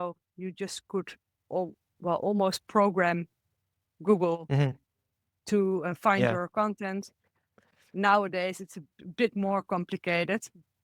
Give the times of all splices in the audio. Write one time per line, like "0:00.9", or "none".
none